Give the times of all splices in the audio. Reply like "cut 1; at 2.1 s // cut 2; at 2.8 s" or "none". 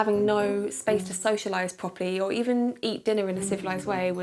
none